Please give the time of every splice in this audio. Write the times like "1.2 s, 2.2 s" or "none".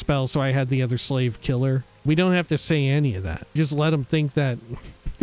2.0 s, 3.6 s